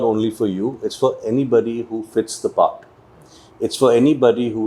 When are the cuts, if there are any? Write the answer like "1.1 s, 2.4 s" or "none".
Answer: none